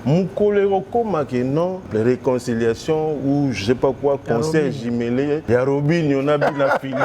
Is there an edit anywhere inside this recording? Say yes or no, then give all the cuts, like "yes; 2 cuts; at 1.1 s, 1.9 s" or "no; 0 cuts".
yes; 2 cuts; at 1.9 s, 5.4 s